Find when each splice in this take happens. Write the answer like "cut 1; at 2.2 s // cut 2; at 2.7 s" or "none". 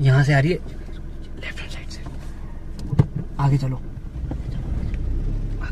none